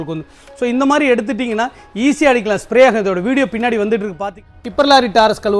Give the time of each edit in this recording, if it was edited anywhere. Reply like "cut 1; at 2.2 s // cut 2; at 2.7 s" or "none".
cut 1; at 4.3 s

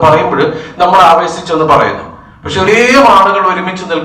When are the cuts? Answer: cut 1; at 2.7 s

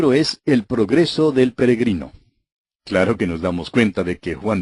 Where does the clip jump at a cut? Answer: none

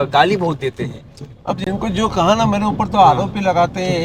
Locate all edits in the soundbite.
none

